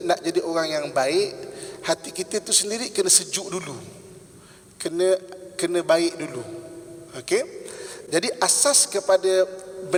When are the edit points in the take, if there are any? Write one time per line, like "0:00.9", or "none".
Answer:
none